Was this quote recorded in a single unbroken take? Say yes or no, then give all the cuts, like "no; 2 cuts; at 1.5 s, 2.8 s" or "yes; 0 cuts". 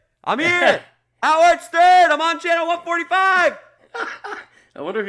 yes; 0 cuts